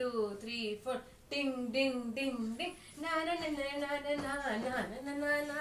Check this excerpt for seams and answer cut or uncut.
uncut